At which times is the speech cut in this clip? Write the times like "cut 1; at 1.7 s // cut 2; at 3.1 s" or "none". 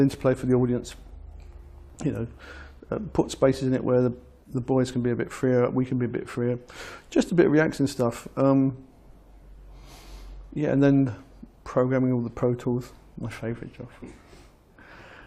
cut 1; at 2.8 s

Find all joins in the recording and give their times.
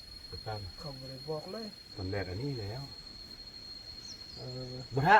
cut 1; at 2.0 s

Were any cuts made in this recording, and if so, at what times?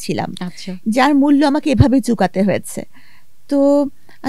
none

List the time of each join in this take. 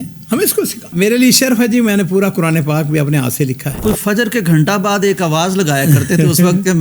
cut 1; at 0.9 s // cut 2; at 3.7 s

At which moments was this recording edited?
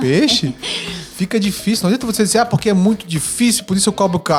none

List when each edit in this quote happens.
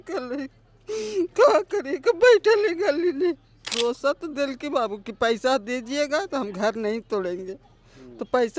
cut 1; at 3.7 s

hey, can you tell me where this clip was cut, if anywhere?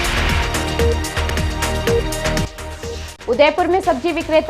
cut 1; at 2.4 s

